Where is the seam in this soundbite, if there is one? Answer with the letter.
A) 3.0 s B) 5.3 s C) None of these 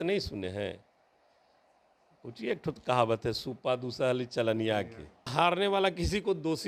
B